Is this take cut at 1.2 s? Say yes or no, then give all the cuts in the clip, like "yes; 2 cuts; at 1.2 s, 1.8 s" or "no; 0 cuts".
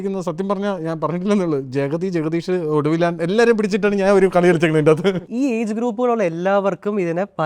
no; 1 cut; at 5.2 s